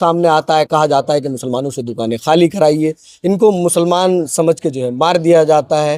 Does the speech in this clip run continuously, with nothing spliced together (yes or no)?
yes